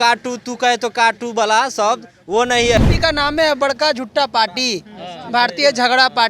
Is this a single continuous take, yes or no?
no